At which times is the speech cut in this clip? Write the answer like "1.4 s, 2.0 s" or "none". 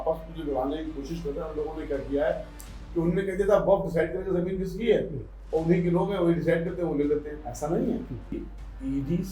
8.3 s